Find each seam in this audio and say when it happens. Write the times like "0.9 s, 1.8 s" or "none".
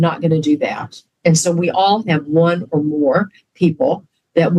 none